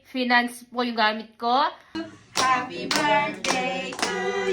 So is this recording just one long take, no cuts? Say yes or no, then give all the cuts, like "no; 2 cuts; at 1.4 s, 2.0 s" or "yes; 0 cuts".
no; 1 cut; at 2.0 s